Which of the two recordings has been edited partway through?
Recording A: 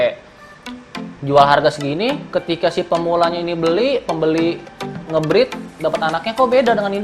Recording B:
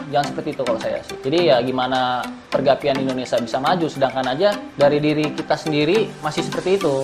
B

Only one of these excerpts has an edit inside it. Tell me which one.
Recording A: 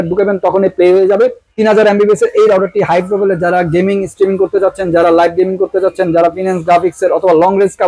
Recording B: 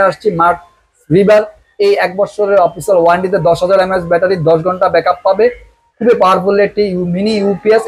A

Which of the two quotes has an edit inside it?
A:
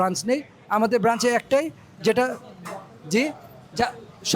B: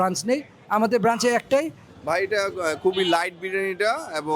B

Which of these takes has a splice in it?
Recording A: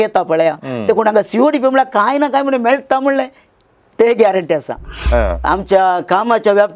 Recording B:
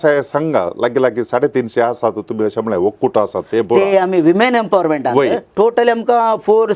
A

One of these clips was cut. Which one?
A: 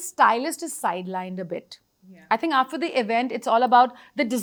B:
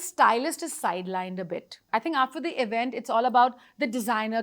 B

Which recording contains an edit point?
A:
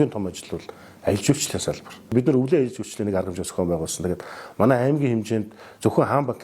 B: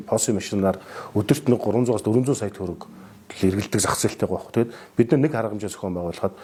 A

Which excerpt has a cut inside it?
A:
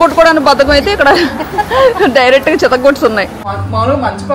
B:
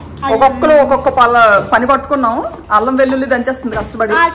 A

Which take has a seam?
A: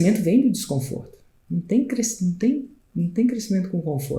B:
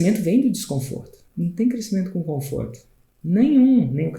B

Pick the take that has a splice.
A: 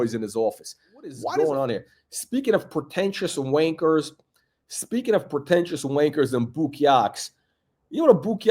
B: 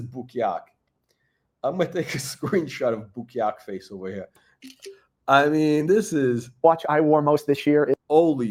A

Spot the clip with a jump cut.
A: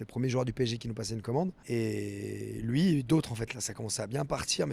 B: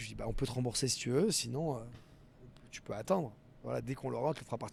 A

